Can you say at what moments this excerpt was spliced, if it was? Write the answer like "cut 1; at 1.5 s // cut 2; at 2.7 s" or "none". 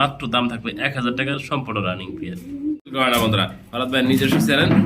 cut 1; at 2.9 s